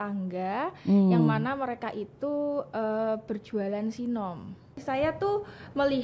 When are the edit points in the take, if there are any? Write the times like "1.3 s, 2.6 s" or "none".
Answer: 4.7 s